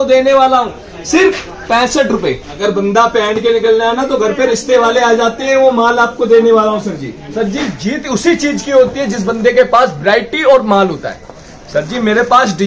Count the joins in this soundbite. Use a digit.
2